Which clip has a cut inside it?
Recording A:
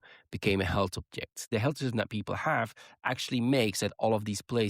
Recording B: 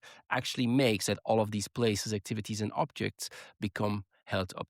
A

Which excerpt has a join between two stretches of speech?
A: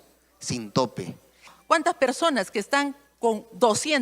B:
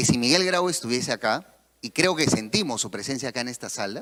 A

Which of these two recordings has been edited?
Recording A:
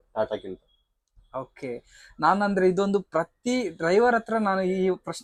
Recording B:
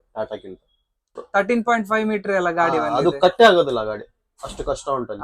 B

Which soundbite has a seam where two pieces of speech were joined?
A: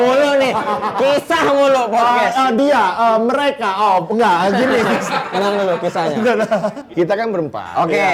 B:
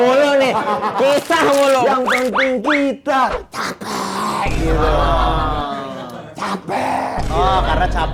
B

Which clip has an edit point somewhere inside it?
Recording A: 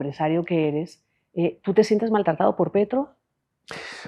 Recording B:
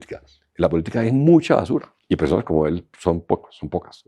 B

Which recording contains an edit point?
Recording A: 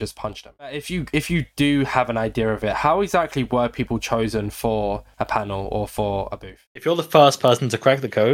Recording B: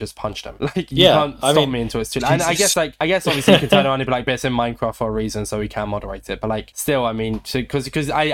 A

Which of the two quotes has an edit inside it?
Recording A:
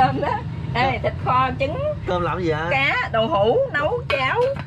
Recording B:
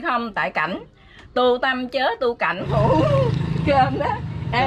B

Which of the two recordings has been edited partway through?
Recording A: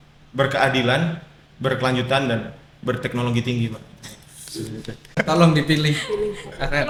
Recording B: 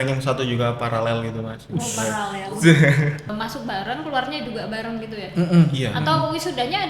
B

